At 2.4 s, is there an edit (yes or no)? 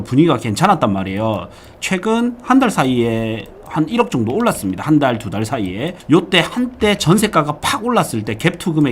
no